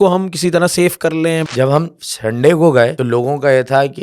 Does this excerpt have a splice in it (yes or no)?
yes